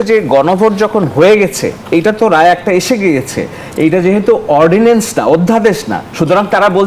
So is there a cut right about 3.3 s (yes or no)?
no